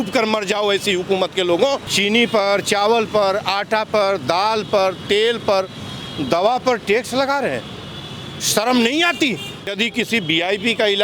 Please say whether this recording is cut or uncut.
cut